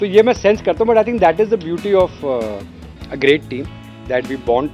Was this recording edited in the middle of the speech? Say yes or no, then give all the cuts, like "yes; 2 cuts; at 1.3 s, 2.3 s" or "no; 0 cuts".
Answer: no; 0 cuts